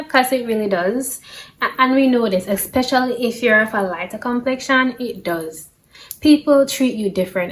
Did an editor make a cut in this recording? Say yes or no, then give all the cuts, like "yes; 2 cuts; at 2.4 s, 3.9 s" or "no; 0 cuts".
no; 0 cuts